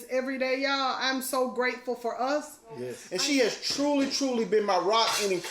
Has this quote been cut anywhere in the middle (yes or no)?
yes